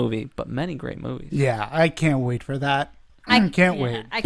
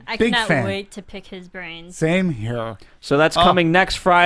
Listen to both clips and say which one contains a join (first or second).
first